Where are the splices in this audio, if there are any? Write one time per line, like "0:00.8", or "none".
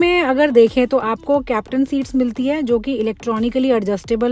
none